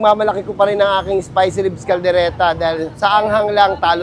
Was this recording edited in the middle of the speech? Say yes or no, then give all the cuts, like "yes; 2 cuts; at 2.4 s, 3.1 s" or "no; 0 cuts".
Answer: no; 0 cuts